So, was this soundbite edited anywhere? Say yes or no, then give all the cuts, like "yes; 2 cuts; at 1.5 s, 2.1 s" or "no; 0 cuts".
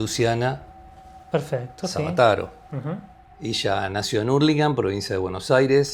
yes; 1 cut; at 3.1 s